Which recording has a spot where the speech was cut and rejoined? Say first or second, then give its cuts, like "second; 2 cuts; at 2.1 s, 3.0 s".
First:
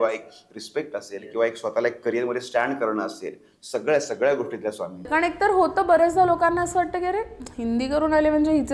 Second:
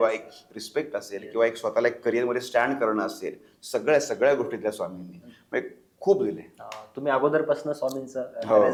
first; 1 cut; at 5.1 s